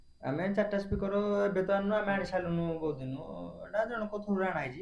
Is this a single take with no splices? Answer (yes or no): yes